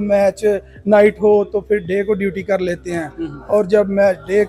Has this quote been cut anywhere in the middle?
no; 0 cuts

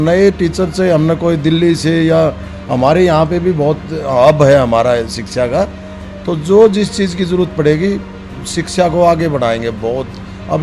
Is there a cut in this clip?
no; 0 cuts

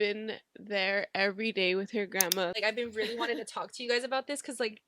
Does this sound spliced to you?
yes; 1 cut; at 2.6 s

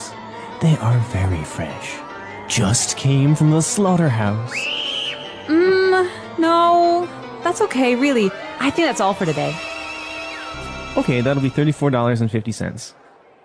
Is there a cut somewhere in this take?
yes; 1 cut; at 10.5 s

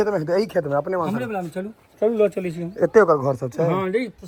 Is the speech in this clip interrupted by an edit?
no; 0 cuts

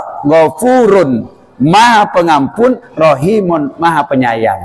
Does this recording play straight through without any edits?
yes; 0 cuts

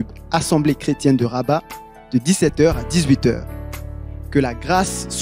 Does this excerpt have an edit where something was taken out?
no; 0 cuts

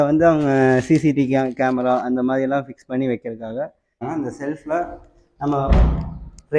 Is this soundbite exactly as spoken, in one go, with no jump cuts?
no; 1 cut; at 4.0 s

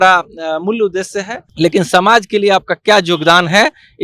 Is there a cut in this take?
yes; 1 cut; at 1.4 s

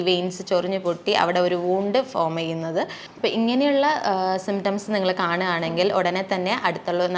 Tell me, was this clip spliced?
yes; 1 cut; at 3.0 s

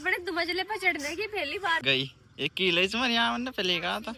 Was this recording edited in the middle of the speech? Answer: yes; 1 cut; at 1.8 s

